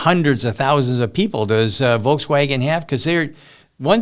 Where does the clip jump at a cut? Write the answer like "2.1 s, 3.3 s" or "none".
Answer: none